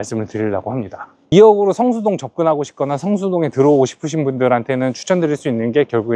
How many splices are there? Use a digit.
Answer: 1